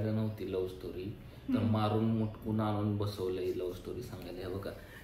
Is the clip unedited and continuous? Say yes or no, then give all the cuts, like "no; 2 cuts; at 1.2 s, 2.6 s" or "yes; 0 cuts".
yes; 0 cuts